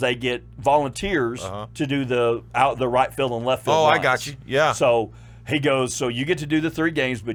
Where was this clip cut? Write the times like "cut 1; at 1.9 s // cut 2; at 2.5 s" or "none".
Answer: none